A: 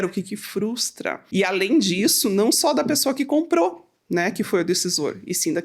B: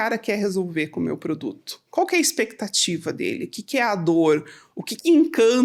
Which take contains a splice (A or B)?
A